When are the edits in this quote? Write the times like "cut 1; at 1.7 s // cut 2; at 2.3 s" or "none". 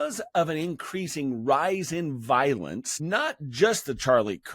cut 1; at 2.9 s